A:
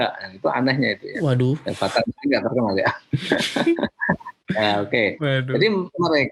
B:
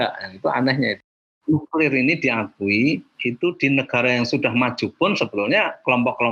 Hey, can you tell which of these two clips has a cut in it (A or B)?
B